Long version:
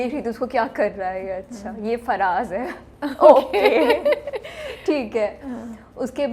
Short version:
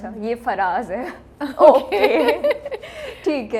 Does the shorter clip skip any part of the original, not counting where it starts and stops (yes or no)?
no